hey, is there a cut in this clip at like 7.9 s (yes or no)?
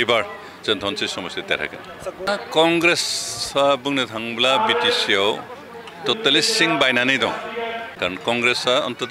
yes